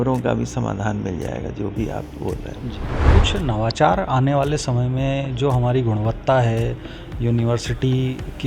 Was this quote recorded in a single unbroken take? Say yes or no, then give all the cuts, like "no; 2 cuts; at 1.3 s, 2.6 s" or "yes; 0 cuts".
no; 1 cut; at 3.0 s